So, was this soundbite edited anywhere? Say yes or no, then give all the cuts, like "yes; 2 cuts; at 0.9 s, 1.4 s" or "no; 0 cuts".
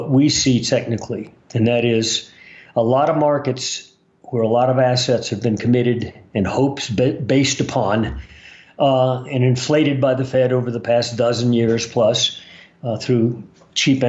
no; 0 cuts